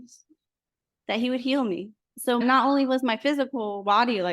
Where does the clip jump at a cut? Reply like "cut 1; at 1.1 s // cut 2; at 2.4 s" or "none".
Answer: cut 1; at 2.2 s